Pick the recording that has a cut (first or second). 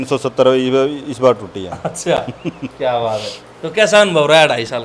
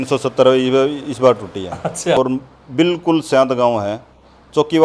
second